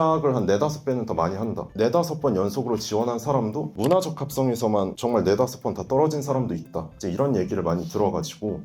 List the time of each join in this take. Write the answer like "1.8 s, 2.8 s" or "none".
none